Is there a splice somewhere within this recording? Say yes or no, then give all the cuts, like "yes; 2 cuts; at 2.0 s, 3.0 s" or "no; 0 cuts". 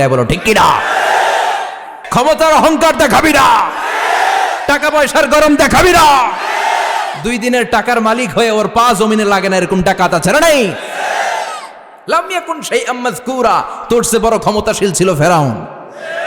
yes; 1 cut; at 2.0 s